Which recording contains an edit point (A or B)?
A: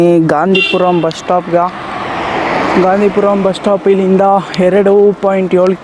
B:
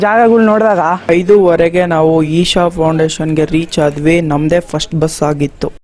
B